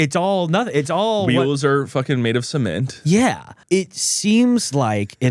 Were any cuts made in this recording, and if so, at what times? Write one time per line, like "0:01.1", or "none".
0:03.5